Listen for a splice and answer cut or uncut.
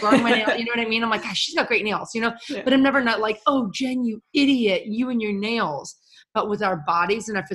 uncut